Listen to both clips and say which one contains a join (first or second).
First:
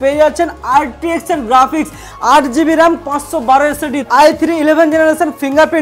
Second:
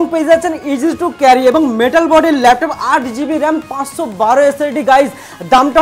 first